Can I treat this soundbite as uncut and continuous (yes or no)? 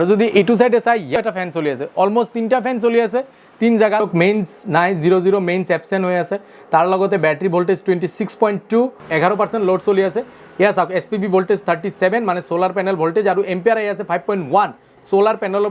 no